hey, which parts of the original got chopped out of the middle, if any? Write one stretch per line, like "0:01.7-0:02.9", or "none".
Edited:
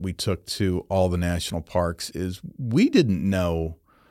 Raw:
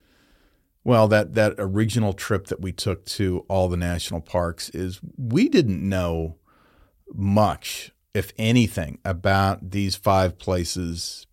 none